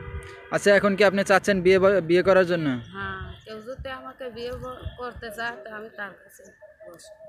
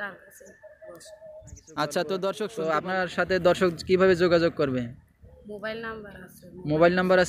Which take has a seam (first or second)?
second